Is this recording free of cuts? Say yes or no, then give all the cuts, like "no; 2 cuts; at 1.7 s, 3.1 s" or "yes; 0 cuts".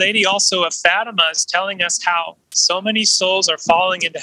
no; 1 cut; at 2.5 s